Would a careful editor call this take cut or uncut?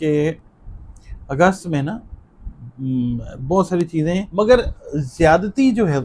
cut